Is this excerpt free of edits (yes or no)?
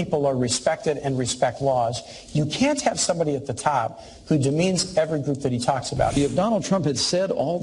no